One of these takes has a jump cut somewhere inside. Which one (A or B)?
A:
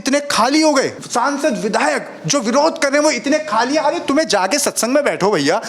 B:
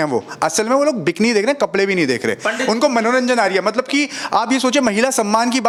A